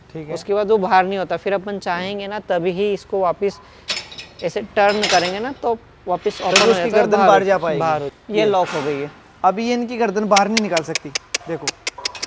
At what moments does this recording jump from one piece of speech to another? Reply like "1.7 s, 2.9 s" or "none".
8.2 s